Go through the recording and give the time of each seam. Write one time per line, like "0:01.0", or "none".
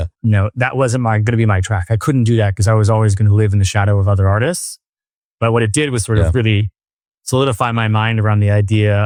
none